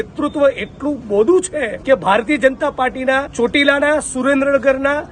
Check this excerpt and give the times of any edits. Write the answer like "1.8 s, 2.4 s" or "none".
1.7 s, 3.3 s